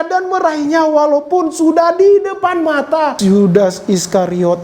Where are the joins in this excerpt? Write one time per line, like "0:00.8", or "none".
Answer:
0:03.1